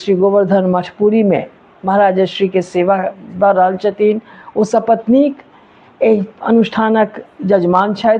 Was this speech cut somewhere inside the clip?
no; 0 cuts

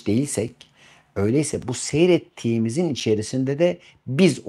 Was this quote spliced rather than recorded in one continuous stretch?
no; 0 cuts

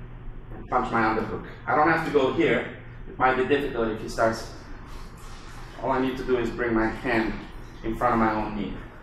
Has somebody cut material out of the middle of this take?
no; 0 cuts

